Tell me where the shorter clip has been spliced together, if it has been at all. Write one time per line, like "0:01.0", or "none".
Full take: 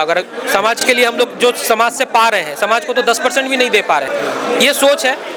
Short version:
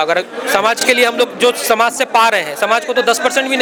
none

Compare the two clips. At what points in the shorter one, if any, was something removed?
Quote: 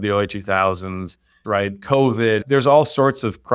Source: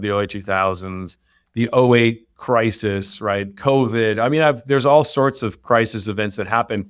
0:01.3
0:02.4

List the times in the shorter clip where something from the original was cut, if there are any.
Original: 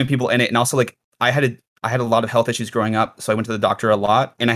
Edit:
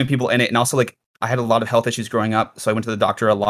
0:01.0

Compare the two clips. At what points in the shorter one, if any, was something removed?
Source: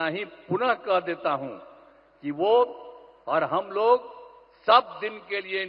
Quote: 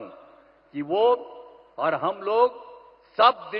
none

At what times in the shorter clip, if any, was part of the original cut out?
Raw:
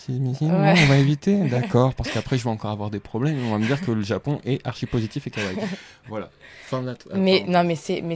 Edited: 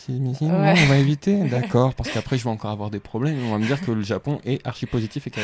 none

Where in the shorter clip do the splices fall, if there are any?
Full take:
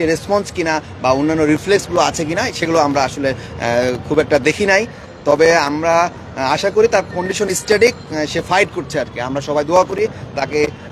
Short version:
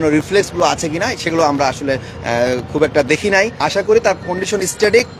0:03.6

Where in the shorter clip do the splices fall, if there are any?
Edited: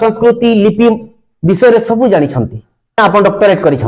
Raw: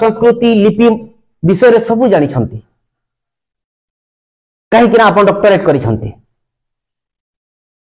0:03.0

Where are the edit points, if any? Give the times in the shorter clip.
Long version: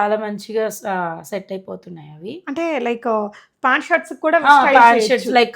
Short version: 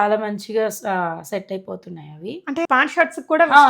0:02.7

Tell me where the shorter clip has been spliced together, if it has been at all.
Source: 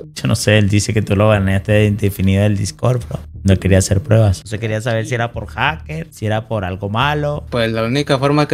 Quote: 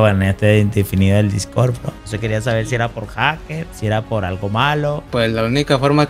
0:02.0

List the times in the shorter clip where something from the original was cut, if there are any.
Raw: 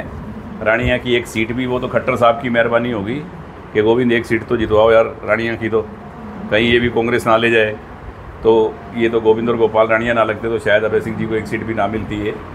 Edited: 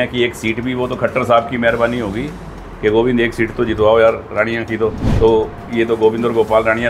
0:05.0

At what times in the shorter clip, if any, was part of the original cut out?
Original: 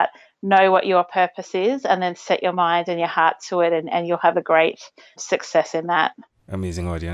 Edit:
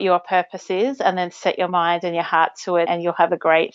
0:02.9

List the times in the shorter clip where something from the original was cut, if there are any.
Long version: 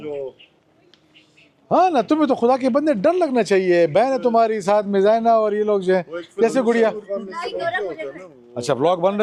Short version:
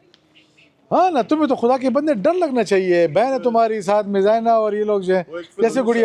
none

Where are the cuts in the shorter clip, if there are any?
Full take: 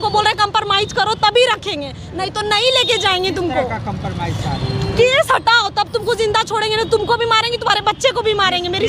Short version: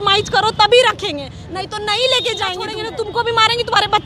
0:02.6

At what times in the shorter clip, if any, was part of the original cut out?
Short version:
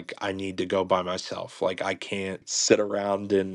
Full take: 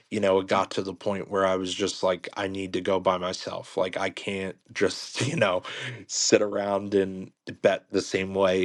0:02.4

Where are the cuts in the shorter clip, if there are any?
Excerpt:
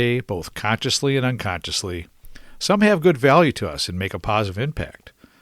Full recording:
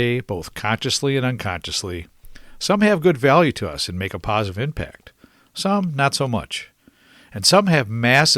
none

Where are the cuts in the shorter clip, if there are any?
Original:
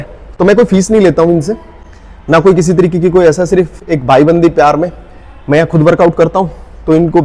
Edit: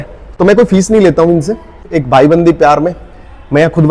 0:01.9

